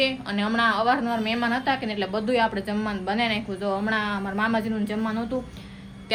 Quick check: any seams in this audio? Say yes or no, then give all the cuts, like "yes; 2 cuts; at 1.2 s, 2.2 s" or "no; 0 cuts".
no; 0 cuts